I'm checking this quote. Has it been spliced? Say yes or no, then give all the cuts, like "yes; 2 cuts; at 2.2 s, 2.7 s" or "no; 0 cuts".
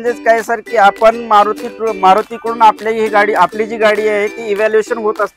no; 0 cuts